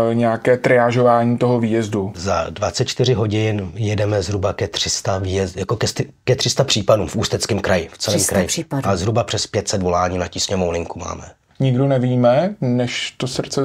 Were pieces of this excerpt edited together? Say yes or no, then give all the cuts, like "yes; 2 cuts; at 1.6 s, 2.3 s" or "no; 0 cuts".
yes; 2 cuts; at 2.2 s, 11.5 s